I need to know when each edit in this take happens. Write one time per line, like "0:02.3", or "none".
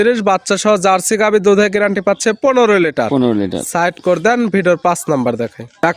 none

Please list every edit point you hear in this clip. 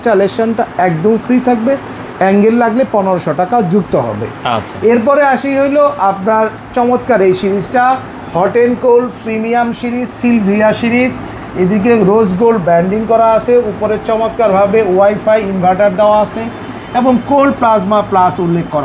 none

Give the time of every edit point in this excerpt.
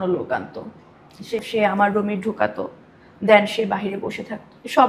0:01.4

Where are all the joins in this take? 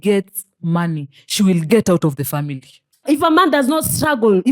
0:03.0

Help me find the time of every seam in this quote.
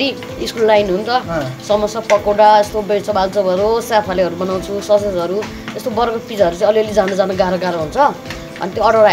none

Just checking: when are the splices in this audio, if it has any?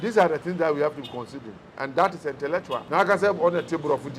0:02.8

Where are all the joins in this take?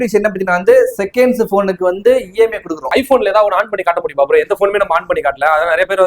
0:02.9

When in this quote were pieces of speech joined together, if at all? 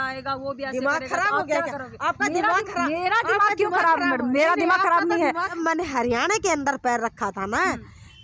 0:05.6

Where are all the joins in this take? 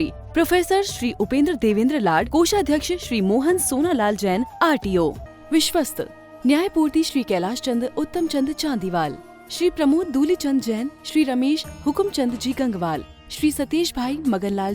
0:05.3

